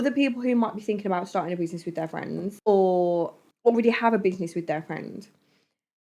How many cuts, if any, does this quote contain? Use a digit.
2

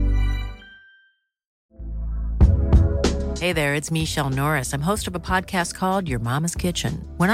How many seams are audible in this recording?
1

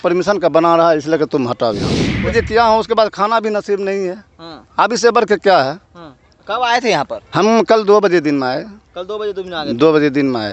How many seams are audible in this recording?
1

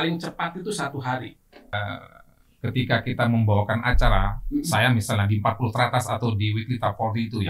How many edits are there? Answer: 1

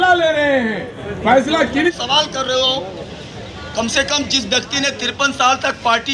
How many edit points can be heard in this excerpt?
1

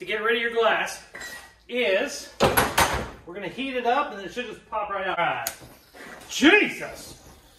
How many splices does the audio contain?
1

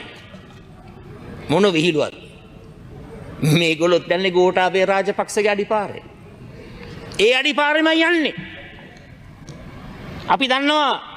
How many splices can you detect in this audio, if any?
0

